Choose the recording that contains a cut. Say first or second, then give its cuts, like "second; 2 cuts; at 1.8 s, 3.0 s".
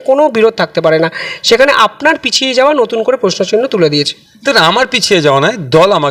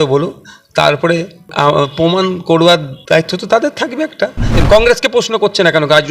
second; 2 cuts; at 2.9 s, 4.6 s